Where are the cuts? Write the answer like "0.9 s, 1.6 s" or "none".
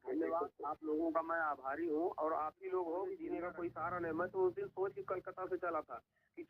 3.3 s